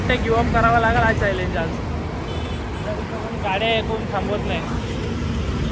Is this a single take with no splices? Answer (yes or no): yes